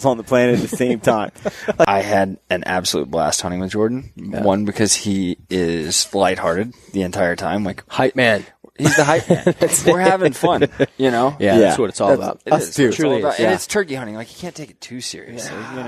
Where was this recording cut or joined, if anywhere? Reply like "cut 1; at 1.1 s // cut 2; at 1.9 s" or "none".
cut 1; at 1.9 s